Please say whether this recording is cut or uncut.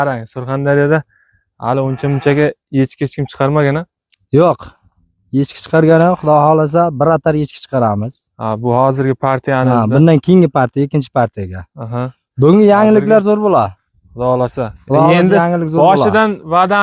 uncut